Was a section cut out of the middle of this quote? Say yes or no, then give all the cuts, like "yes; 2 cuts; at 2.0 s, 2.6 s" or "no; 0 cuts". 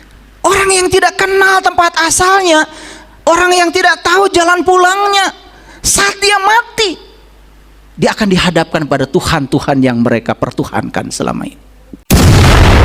yes; 1 cut; at 12.0 s